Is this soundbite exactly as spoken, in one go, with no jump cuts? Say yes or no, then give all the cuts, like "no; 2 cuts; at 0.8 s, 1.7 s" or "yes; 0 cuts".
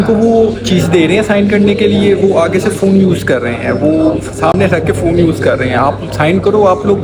yes; 0 cuts